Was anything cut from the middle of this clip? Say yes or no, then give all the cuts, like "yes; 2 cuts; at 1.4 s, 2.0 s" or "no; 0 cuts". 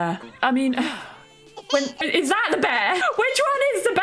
no; 0 cuts